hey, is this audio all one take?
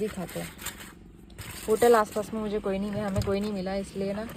yes; 0 cuts

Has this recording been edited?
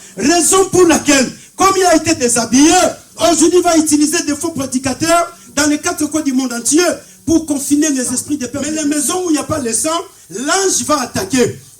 yes; 1 cut; at 8.5 s

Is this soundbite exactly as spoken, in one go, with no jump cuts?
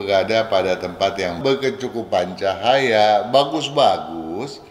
no; 1 cut; at 1.4 s

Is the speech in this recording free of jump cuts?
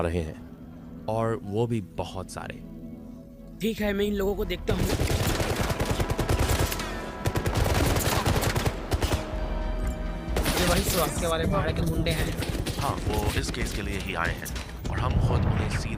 yes; 0 cuts

